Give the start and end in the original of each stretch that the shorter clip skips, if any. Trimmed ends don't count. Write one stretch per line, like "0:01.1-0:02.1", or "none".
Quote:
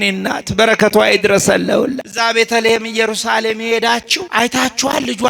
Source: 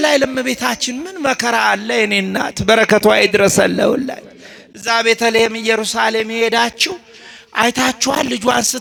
0:04.1-0:04.7
0:06.9-0:07.4